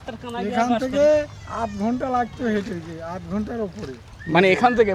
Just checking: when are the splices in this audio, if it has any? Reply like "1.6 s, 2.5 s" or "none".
none